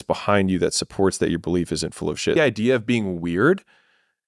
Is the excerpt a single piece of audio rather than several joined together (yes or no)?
no